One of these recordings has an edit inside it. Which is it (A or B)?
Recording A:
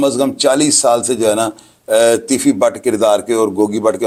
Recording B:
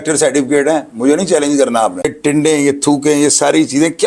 B